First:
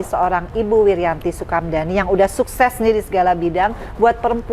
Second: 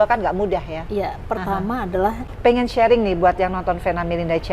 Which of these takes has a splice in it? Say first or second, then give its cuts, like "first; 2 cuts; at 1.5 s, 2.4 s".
second; 1 cut; at 2.3 s